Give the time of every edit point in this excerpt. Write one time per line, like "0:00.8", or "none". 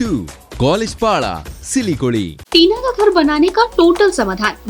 0:02.4